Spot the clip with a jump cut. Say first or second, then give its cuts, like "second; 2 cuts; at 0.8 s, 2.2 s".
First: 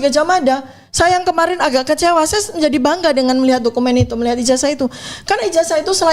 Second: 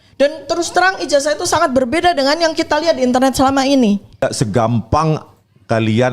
second; 1 cut; at 4.2 s